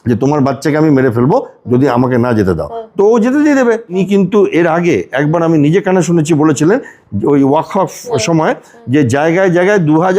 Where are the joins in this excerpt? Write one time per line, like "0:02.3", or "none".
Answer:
0:04.0